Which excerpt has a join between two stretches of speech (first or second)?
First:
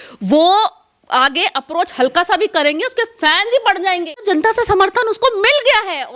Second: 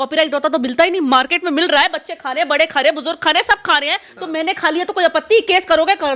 first